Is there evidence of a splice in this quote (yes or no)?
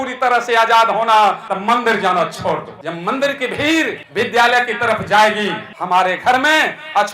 yes